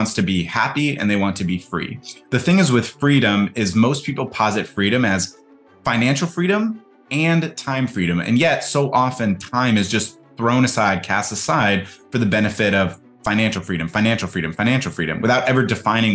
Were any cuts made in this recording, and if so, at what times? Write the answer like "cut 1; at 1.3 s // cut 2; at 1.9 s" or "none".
none